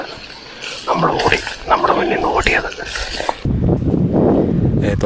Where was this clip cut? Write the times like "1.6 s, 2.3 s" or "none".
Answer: 3.4 s